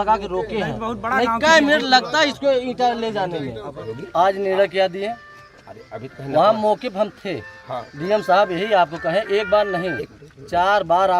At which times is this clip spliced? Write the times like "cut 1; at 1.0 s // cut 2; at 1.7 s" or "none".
cut 1; at 3.9 s